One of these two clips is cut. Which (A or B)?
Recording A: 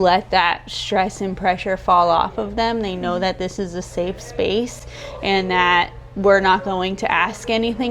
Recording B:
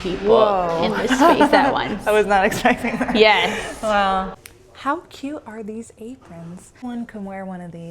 B